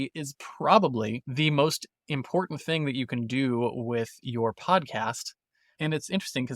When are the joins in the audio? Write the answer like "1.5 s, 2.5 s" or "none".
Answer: 1.3 s